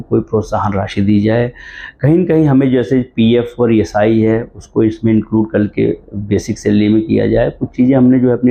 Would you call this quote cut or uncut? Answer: uncut